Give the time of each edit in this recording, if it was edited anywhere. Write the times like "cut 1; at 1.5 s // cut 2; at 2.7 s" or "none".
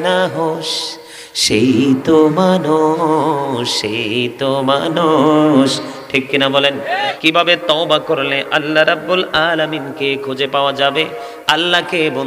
cut 1; at 7.1 s